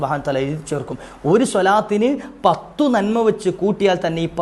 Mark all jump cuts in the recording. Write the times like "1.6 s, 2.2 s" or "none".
none

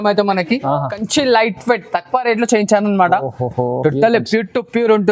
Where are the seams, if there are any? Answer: 1.0 s

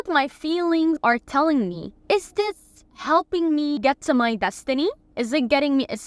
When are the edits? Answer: 1.0 s, 1.9 s, 3.8 s, 5.1 s

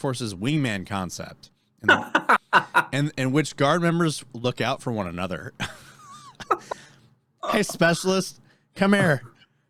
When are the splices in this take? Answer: none

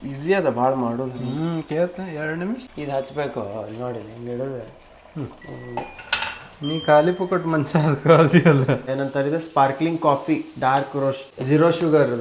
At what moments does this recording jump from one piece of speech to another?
2.7 s, 8.9 s, 11.3 s

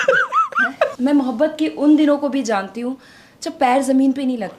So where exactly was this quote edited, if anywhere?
0.9 s

